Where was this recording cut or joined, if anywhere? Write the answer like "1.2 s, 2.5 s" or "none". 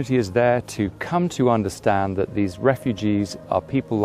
none